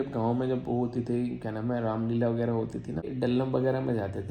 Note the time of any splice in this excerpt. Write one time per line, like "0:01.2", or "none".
0:03.0